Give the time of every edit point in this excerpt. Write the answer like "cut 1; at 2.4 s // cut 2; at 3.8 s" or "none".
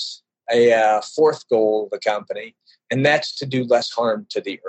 none